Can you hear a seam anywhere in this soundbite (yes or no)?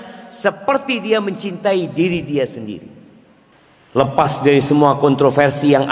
yes